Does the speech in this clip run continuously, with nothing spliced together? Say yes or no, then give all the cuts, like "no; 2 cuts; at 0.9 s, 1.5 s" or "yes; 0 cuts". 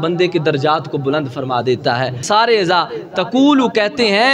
no; 1 cut; at 2.2 s